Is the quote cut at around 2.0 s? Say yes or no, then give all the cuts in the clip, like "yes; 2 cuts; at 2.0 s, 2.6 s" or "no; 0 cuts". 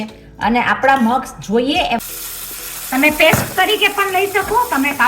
yes; 1 cut; at 2.0 s